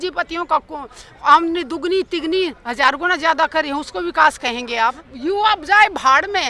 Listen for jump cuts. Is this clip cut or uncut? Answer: cut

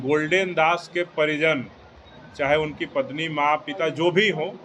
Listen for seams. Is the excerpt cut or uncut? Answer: uncut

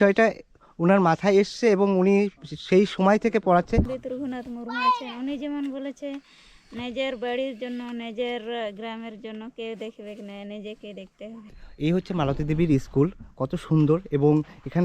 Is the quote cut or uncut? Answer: cut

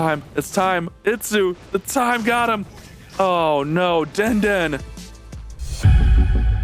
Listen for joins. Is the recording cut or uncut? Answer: uncut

